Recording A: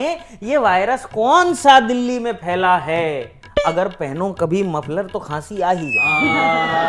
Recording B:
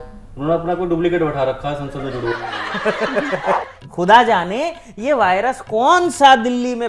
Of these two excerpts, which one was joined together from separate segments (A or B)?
B